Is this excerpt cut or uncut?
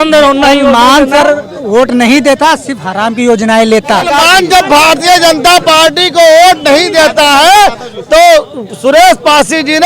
cut